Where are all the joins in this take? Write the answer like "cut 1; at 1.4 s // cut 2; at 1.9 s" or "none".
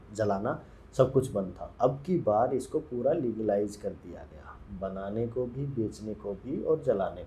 cut 1; at 1.6 s